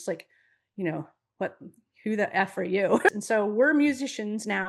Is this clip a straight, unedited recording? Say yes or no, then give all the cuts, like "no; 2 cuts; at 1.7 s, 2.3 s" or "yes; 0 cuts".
no; 1 cut; at 3.1 s